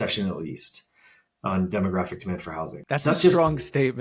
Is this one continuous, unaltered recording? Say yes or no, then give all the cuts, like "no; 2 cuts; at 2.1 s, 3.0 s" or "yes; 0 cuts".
no; 1 cut; at 2.8 s